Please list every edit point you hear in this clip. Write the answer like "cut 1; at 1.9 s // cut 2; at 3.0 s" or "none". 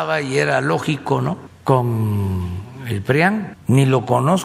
cut 1; at 1.5 s // cut 2; at 3.5 s